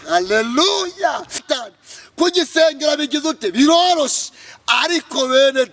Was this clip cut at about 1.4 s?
yes; 1 cut; at 1.4 s

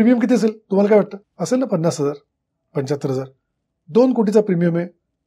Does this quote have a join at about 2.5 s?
no; 1 cut; at 1.3 s

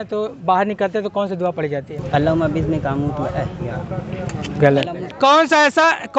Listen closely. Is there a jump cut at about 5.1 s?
yes; 2 cuts; at 2.0 s, 5.1 s

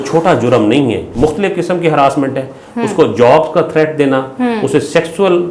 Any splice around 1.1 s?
yes; 1 cut; at 1.1 s

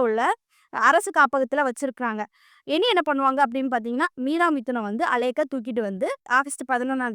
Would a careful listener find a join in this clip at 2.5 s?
no; 1 cut; at 6.2 s

